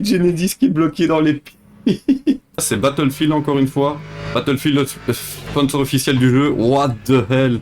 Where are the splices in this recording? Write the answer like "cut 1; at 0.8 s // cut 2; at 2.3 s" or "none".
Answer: cut 1; at 2.6 s